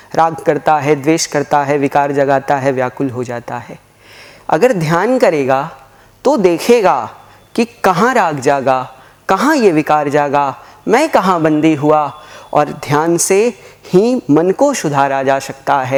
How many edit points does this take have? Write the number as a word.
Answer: zero